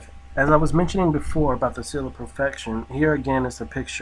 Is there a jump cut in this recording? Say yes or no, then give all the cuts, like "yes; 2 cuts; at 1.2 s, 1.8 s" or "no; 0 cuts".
yes; 1 cut; at 2.2 s